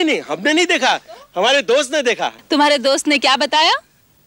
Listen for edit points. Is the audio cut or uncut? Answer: cut